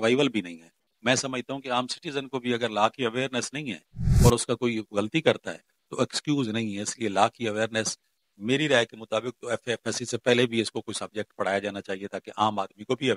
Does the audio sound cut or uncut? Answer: uncut